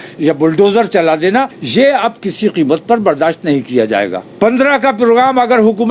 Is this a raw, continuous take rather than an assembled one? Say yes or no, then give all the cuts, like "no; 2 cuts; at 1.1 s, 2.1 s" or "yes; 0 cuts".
no; 2 cuts; at 1.6 s, 4.2 s